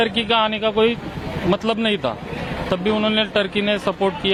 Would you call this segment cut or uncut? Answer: uncut